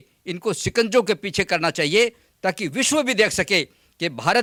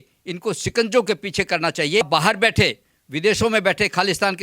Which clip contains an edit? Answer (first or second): second